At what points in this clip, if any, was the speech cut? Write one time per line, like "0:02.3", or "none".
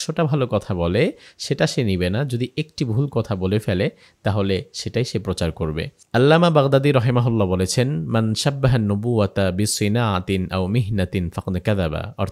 0:06.0